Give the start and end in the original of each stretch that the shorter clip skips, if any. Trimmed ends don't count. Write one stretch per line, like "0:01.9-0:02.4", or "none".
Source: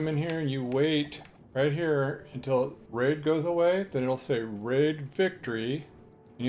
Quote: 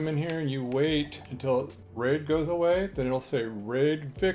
0:01.6-0:02.6